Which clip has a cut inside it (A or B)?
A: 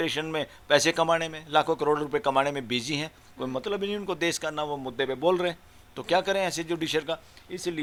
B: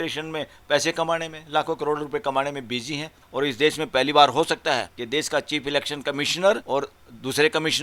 B